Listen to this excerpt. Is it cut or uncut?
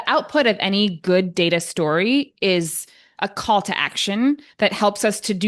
uncut